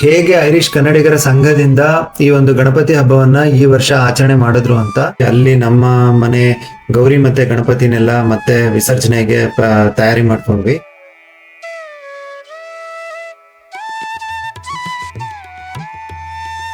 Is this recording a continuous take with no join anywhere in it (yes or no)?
no